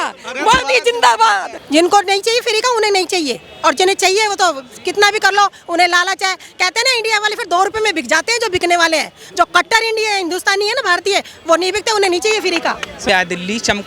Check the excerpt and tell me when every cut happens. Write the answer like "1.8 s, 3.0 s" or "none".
1.5 s, 13.1 s